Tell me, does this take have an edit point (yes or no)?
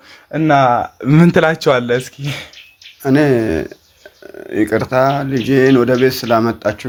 no